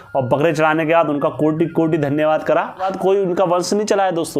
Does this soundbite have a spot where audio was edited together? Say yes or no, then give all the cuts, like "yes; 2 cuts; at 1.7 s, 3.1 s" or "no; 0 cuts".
yes; 1 cut; at 2.9 s